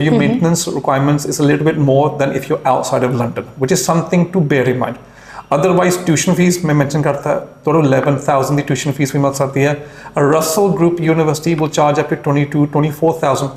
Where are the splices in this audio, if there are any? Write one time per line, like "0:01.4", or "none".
none